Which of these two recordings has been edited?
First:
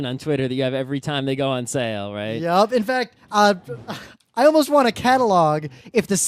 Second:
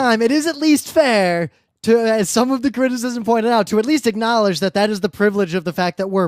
second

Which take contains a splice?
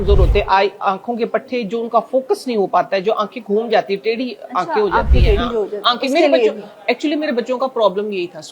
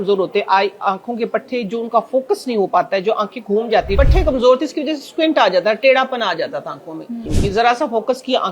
second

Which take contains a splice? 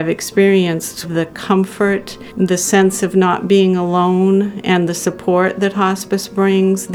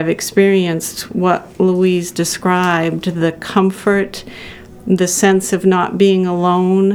first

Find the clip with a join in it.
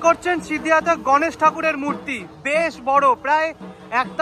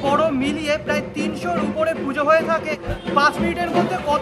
second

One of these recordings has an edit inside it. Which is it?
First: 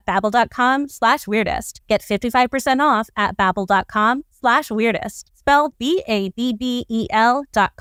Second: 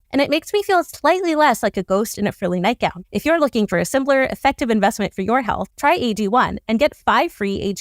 second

